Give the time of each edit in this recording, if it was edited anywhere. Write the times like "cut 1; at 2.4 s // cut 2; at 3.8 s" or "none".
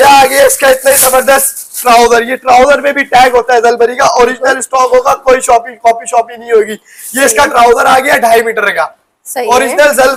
none